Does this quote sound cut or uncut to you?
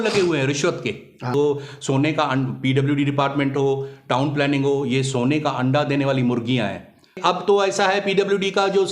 cut